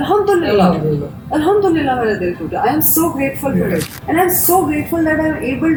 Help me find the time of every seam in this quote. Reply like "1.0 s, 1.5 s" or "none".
none